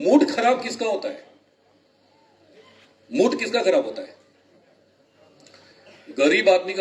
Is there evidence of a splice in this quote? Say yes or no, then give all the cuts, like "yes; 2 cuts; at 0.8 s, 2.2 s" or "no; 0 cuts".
no; 0 cuts